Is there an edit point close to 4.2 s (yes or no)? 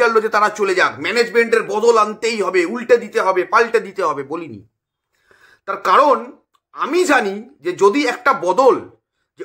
no